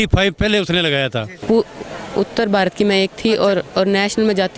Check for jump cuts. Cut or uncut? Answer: cut